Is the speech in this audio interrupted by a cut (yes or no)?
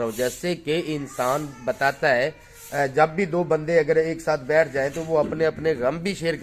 no